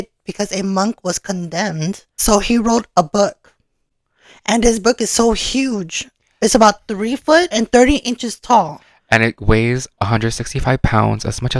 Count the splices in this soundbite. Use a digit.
2